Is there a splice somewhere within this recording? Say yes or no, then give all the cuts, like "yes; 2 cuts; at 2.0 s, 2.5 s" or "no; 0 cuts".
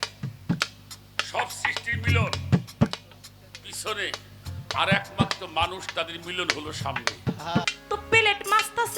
yes; 1 cut; at 7.6 s